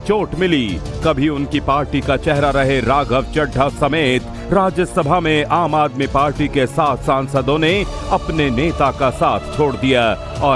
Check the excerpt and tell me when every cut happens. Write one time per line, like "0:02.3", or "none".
0:07.0